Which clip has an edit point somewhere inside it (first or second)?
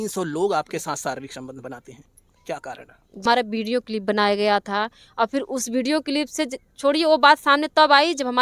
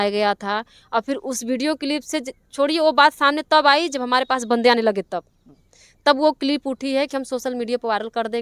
first